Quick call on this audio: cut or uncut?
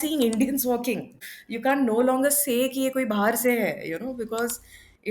cut